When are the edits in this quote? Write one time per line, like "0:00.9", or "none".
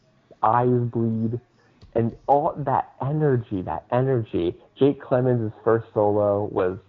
0:01.7